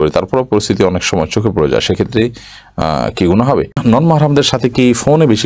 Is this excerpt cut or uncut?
cut